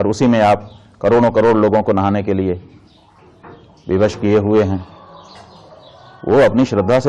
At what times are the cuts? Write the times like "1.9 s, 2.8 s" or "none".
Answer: none